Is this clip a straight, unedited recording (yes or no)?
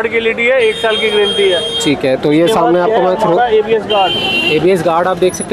yes